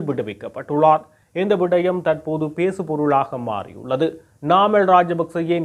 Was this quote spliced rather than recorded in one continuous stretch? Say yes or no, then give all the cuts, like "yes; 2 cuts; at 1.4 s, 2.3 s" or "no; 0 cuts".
no; 0 cuts